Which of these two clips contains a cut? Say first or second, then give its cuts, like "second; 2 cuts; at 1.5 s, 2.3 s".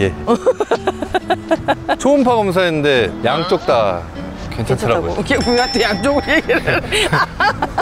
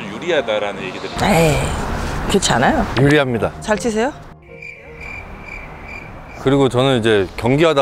second; 1 cut; at 6.3 s